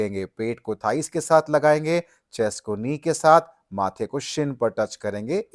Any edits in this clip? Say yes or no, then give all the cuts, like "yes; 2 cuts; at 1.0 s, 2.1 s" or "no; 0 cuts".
no; 0 cuts